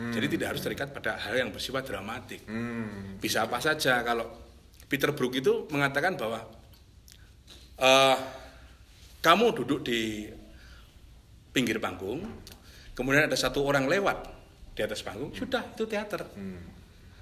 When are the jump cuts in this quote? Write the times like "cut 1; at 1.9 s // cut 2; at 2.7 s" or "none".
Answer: none